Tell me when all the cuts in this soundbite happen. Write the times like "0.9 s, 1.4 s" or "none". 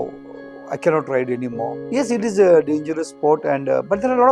1.8 s